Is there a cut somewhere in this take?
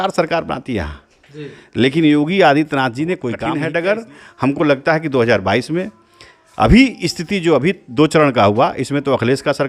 yes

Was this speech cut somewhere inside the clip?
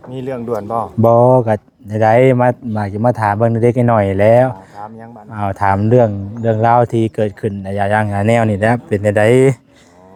no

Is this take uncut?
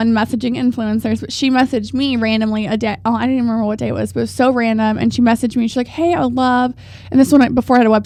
yes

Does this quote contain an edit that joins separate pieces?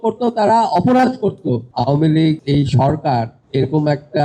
yes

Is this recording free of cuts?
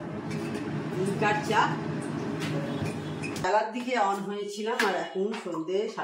no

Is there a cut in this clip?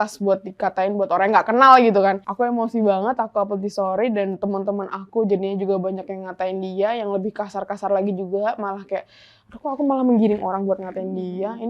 no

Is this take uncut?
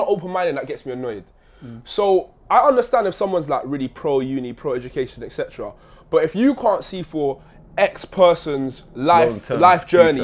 yes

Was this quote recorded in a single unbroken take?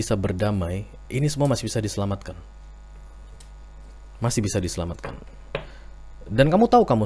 no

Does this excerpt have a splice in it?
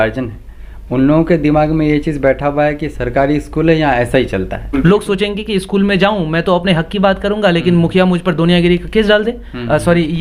yes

